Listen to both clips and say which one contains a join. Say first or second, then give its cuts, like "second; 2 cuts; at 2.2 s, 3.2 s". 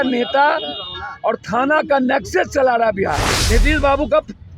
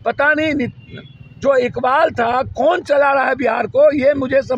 first; 1 cut; at 3.3 s